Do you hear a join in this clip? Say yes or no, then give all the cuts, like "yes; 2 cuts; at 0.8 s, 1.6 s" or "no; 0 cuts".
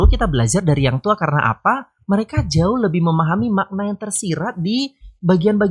no; 0 cuts